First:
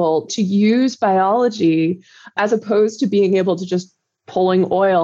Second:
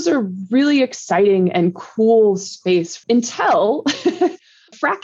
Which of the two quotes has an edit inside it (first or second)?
second